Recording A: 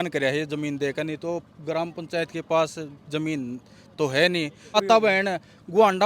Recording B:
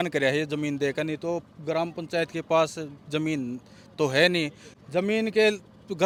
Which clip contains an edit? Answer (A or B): A